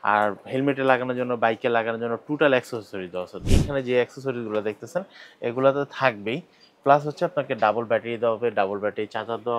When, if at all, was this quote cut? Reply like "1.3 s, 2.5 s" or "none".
3.4 s